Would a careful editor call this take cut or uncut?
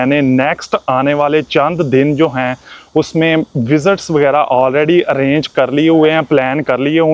uncut